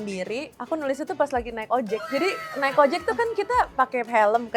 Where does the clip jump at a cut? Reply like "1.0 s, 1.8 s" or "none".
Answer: 2.1 s

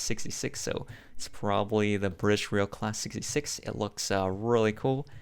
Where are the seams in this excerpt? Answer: none

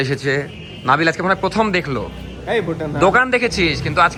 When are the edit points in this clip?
none

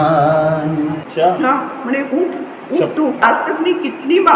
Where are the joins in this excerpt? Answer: 1.0 s, 3.3 s

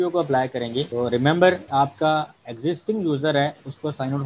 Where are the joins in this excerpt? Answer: 0.9 s, 1.6 s, 2.4 s

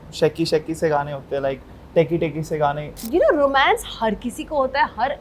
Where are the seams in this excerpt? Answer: 3.0 s

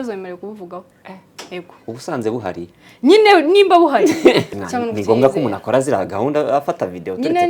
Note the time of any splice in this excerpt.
4.6 s

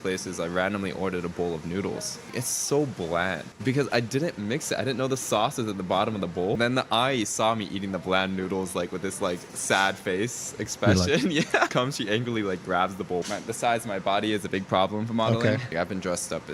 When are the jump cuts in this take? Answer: 2.3 s, 3.5 s, 6.6 s, 11.7 s, 13.3 s, 15.7 s

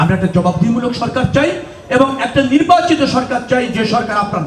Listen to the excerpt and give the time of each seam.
none

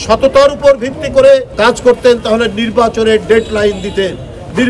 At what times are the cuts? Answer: 1.5 s

